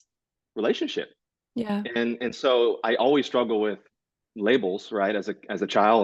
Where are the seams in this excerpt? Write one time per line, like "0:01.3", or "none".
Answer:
none

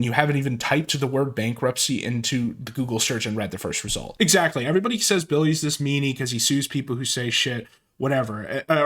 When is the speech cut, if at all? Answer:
0:04.3

